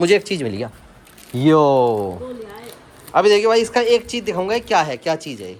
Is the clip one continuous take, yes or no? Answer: yes